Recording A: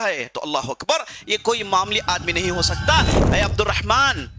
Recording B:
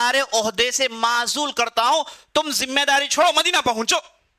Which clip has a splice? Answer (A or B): A